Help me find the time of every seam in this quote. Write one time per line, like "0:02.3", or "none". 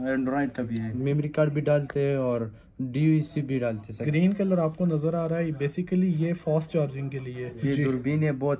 0:01.0
0:04.0
0:07.5